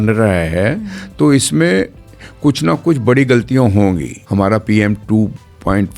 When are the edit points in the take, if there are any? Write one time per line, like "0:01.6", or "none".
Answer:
0:04.1